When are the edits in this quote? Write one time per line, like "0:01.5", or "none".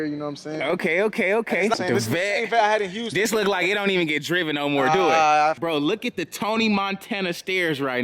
0:01.7
0:05.6

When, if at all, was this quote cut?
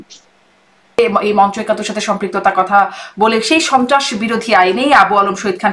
0:01.0

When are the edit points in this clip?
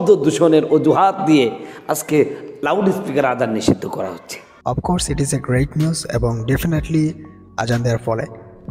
none

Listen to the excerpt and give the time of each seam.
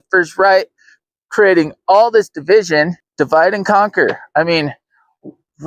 0:03.0

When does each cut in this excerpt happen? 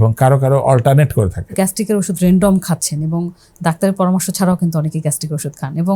0:01.5

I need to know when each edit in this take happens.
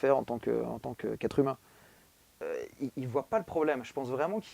0:02.2

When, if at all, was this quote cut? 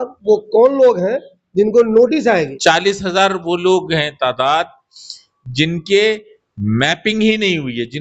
0:02.6

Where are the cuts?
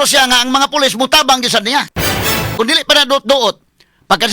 0:02.5

